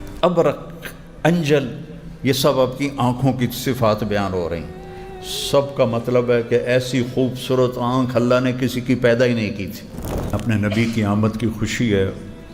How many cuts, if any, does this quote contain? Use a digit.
1